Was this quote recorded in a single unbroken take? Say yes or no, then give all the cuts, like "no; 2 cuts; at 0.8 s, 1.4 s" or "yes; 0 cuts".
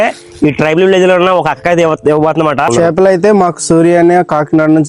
no; 1 cut; at 2.7 s